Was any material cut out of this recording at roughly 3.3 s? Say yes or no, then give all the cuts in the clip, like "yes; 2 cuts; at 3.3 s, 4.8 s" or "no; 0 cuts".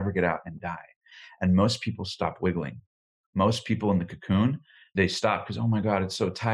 no; 1 cut; at 4.9 s